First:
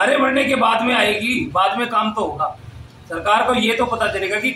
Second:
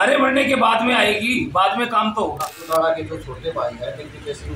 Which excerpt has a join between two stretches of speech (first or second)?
second